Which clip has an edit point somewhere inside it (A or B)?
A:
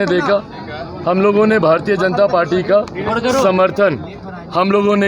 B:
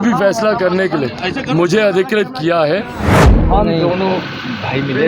B